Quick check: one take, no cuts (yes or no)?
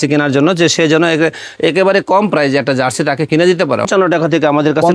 no